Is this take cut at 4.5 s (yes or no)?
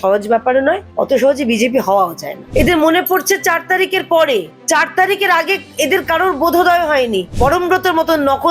yes